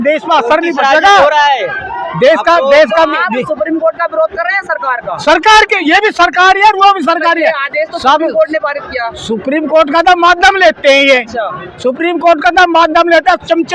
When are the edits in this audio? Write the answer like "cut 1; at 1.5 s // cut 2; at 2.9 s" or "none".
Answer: none